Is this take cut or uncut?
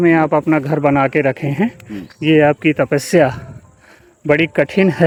uncut